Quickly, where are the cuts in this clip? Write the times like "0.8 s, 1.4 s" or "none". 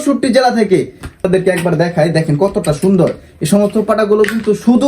1.2 s